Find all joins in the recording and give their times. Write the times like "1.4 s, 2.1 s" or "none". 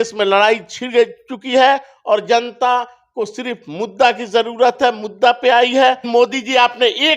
6.0 s